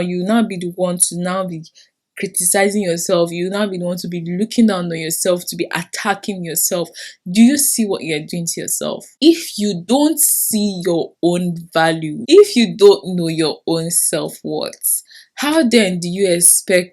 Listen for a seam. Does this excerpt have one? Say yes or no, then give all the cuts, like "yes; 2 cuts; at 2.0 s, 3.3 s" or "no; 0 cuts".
no; 0 cuts